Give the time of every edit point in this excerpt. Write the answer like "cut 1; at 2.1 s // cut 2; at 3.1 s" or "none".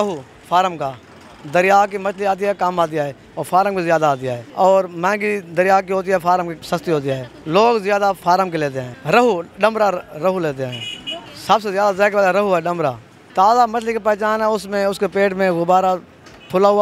none